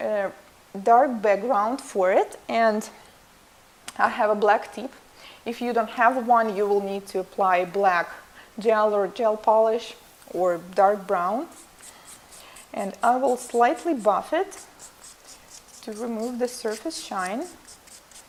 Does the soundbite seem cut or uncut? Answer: uncut